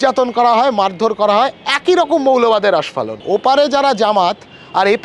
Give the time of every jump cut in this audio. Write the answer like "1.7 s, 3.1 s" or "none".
3.1 s